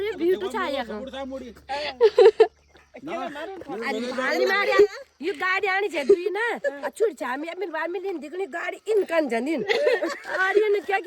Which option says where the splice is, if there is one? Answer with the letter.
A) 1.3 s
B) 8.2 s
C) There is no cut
C